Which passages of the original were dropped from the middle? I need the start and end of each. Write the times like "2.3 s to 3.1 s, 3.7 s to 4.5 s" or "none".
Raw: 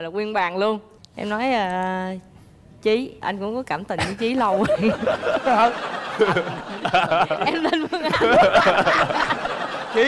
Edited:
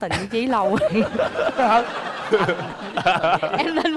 none